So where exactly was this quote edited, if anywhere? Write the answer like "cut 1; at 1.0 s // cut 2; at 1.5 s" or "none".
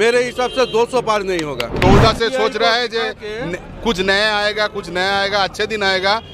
cut 1; at 1.7 s